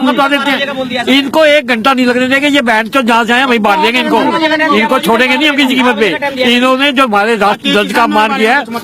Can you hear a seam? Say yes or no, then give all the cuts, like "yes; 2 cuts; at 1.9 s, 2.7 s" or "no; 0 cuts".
no; 0 cuts